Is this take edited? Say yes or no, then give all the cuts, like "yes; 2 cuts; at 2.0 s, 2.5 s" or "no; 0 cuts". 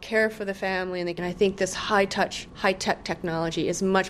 yes; 2 cuts; at 1.2 s, 2.4 s